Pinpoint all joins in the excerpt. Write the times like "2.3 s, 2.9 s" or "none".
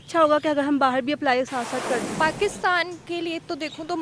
2.0 s